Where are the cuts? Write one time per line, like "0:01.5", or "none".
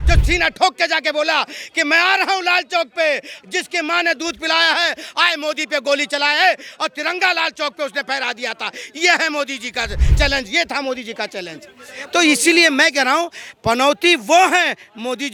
none